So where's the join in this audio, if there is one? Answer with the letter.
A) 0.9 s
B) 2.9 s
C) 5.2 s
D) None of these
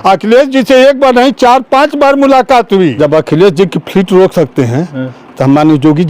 B